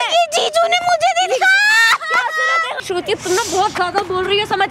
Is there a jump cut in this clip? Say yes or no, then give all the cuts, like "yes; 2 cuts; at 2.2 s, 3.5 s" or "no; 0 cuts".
yes; 1 cut; at 2.8 s